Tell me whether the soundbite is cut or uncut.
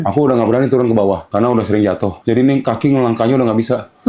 cut